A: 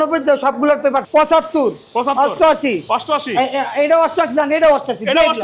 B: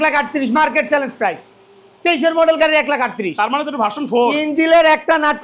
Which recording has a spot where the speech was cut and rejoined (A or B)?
A